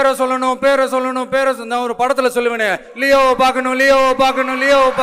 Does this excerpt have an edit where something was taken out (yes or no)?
no